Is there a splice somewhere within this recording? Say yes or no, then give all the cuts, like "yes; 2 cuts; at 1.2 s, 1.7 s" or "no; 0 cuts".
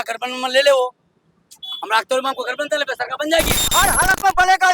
yes; 1 cut; at 3.6 s